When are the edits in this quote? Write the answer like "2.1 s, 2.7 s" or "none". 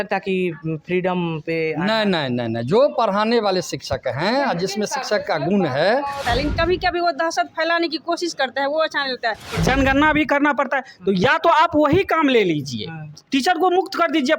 6.2 s, 9.5 s